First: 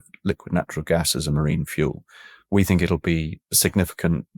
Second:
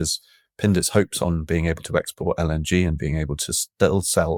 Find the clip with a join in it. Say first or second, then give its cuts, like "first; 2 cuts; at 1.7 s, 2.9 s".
first; 1 cut; at 2.3 s